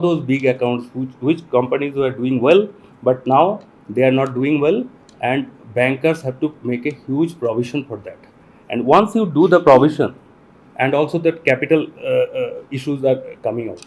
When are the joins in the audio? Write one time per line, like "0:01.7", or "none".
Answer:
none